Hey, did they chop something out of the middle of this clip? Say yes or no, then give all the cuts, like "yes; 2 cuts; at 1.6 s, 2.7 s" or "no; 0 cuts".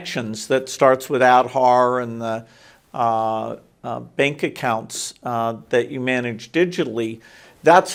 no; 0 cuts